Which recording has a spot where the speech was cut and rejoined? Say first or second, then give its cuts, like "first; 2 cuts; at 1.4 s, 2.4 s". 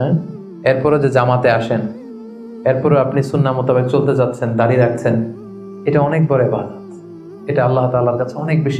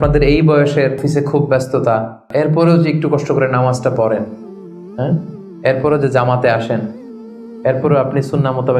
second; 2 cuts; at 1.0 s, 2.3 s